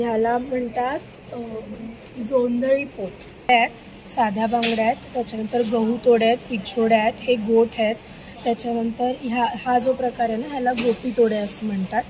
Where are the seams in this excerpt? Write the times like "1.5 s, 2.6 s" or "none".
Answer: 3.5 s